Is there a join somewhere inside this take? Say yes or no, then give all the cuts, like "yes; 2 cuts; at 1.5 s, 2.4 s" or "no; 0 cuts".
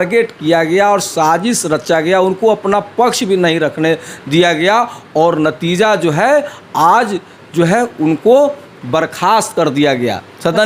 no; 0 cuts